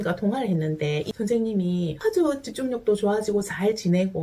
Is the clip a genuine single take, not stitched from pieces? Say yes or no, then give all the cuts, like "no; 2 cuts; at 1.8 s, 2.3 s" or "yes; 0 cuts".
no; 1 cut; at 1.1 s